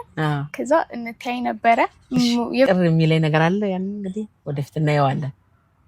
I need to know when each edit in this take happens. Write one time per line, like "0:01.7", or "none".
0:02.7